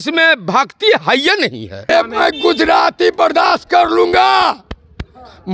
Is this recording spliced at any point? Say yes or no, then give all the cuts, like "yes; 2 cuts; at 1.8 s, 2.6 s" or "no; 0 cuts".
yes; 1 cut; at 1.9 s